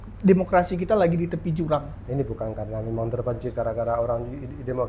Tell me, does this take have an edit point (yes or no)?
yes